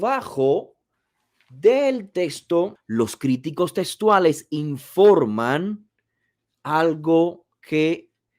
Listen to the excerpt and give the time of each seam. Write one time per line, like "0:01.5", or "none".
0:02.8